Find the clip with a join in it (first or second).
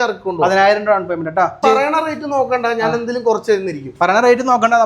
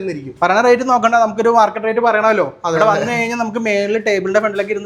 first